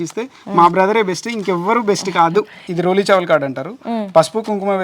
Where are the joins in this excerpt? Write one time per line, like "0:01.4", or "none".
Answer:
0:02.6